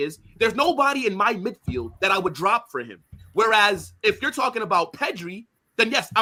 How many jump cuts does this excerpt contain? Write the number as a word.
zero